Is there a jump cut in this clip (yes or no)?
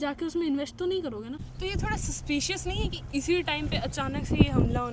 yes